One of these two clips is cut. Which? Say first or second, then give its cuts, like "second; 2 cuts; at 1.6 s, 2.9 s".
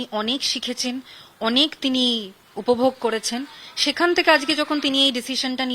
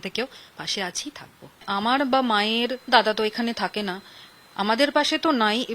second; 1 cut; at 1.6 s